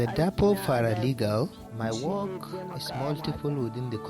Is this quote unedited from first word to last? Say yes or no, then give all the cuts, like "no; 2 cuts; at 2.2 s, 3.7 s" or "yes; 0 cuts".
no; 1 cut; at 1.6 s